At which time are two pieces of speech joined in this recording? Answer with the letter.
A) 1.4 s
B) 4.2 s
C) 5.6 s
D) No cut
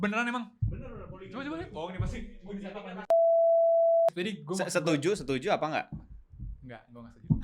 B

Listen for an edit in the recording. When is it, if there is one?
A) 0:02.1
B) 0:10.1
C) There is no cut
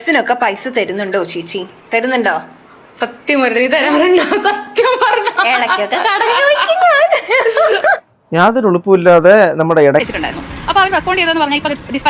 B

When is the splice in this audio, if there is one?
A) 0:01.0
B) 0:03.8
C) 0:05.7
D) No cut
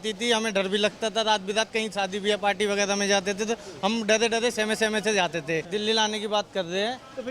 C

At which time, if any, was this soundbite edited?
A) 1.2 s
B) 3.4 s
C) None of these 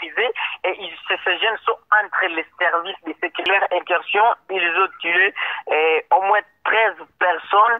B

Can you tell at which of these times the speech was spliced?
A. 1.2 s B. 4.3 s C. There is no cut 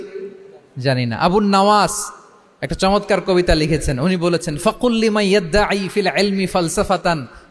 C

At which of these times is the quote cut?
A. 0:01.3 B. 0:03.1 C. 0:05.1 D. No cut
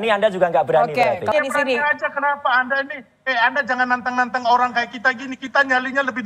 A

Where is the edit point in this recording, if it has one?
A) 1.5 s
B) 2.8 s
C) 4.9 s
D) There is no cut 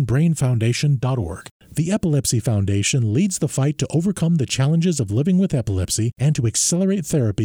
A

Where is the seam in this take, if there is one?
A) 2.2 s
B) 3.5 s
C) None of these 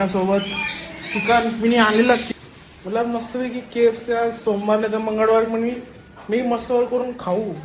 A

